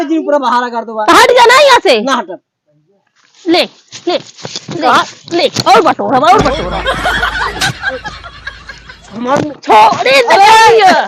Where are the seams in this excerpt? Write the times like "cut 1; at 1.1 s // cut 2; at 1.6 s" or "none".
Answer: none